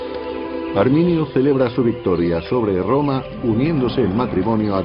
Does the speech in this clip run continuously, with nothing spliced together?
no; 1 cut; at 3.9 s

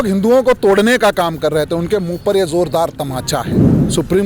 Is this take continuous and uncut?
yes; 0 cuts

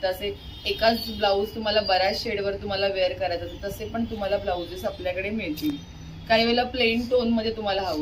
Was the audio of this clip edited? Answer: no; 0 cuts

